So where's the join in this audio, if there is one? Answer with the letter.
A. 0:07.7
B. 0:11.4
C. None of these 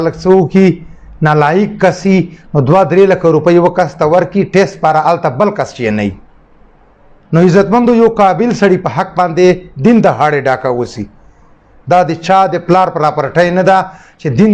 C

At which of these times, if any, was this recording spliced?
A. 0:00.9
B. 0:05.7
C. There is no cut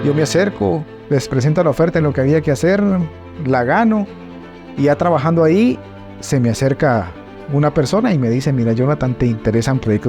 A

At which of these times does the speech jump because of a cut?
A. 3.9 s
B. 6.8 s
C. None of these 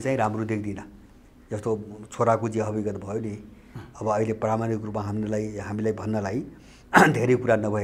C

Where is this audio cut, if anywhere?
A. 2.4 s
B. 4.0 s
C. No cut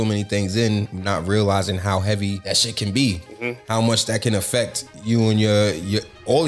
A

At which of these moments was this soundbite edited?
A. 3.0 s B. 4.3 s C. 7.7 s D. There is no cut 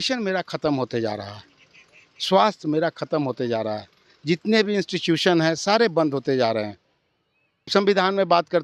C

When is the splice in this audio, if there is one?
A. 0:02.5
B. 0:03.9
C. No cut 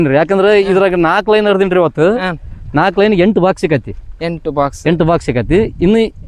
C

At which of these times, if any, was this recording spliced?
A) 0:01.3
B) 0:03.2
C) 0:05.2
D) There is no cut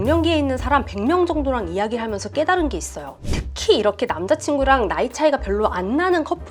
B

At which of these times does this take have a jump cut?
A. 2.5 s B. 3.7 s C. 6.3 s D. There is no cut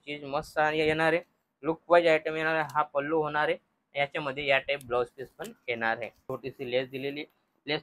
C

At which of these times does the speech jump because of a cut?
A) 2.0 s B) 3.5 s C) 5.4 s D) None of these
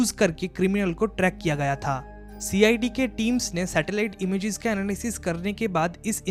D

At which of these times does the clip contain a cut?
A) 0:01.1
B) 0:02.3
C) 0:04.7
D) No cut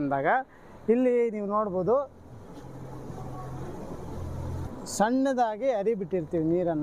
C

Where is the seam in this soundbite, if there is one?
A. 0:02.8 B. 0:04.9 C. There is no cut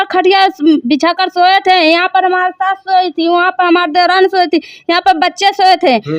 C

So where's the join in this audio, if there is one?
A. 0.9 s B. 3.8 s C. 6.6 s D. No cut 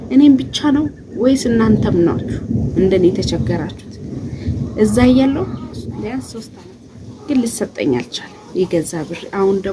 C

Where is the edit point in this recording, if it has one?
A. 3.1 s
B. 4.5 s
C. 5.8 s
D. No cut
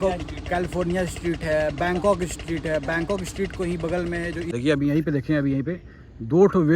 B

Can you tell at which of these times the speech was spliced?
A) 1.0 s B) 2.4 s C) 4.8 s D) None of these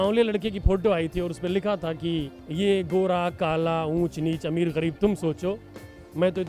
B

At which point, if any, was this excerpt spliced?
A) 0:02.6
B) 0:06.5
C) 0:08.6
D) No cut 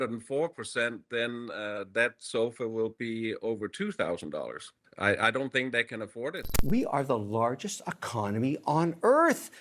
B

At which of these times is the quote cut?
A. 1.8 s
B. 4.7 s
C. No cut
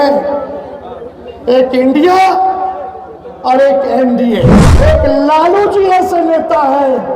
B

